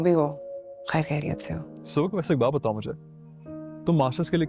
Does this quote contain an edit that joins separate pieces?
yes; 1 cut; at 1.8 s

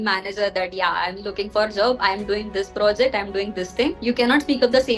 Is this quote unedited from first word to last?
no; 1 cut; at 4.0 s

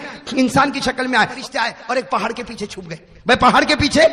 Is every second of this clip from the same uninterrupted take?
no; 1 cut; at 1.3 s

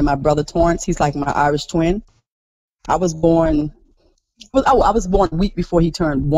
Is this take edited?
no; 0 cuts

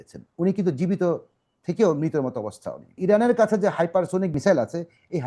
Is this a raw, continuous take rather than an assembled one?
no; 2 cuts; at 3.0 s, 4.3 s

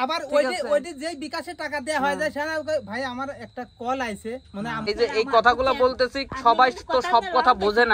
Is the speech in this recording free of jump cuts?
no; 1 cut; at 4.9 s

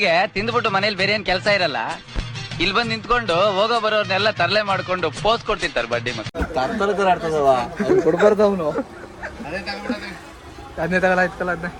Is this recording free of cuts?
yes; 0 cuts

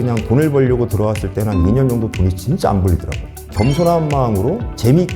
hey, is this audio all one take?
no; 1 cut; at 3.4 s

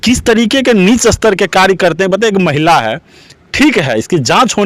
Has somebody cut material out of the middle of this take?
no; 0 cuts

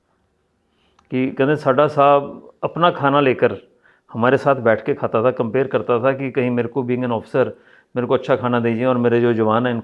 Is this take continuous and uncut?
yes; 0 cuts

